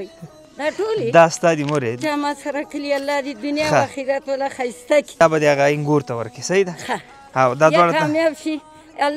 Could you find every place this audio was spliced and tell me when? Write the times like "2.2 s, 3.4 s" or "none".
2.0 s, 5.2 s